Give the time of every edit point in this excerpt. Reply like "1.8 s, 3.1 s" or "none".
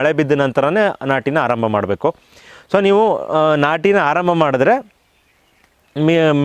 none